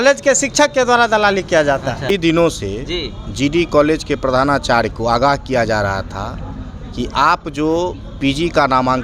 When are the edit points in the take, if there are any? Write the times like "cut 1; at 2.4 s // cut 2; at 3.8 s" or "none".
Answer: cut 1; at 2.1 s

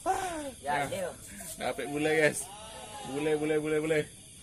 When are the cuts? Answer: none

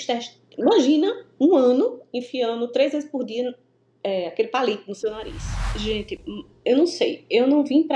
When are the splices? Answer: cut 1; at 5.7 s

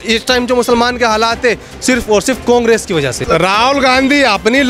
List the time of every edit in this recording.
cut 1; at 3.2 s

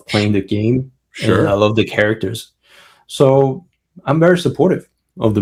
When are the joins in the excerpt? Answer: none

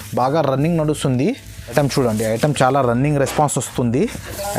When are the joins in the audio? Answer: cut 1; at 1.5 s

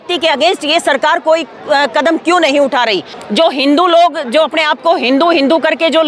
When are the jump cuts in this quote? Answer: cut 1; at 3.1 s

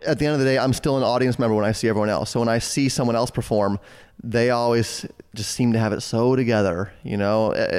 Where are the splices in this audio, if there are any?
none

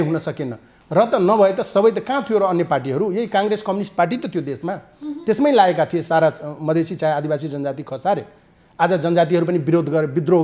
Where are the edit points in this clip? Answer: none

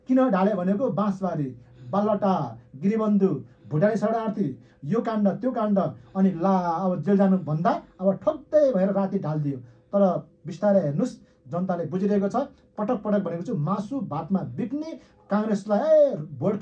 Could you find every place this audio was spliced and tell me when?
none

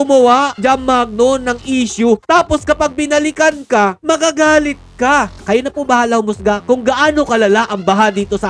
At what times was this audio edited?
cut 1; at 5.4 s

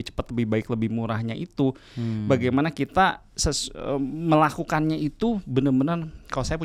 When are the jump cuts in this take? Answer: none

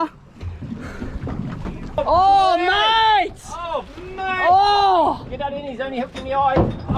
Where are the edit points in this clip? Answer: cut 1; at 2.0 s

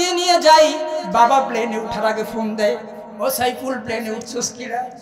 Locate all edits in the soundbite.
none

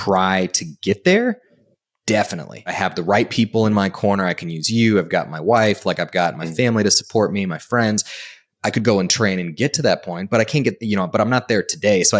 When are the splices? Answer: cut 1; at 2.8 s

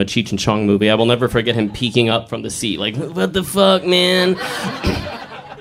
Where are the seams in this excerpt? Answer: cut 1; at 4.7 s

